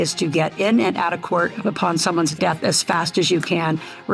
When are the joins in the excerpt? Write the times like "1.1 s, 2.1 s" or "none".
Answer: 2.3 s